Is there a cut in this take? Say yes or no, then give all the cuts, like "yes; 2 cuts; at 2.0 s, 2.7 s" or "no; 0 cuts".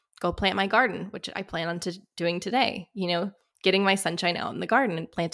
no; 0 cuts